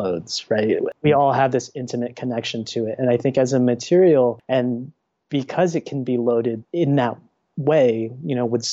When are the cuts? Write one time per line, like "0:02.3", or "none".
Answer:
0:00.9
0:04.4
0:06.6

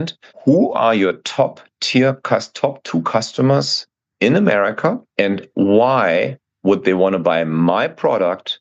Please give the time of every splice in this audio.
0:05.0

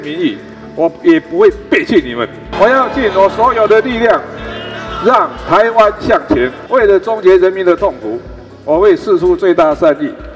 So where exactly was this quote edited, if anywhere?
0:02.5
0:06.6

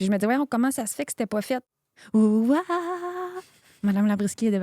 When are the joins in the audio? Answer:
0:01.7

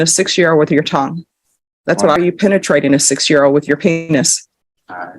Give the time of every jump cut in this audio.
0:02.2

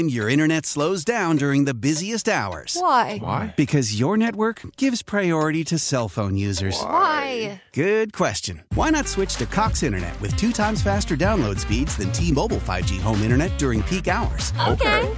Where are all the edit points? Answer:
none

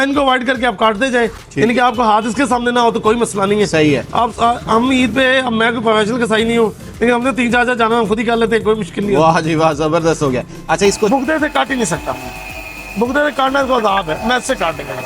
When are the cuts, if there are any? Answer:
0:11.1

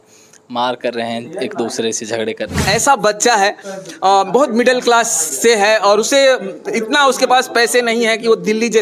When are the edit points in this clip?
0:02.6

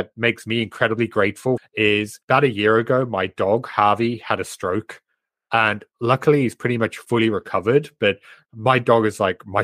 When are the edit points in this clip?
0:01.7

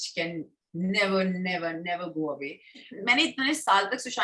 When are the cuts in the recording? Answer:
0:02.9

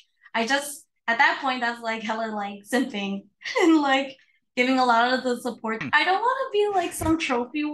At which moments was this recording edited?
0:05.8

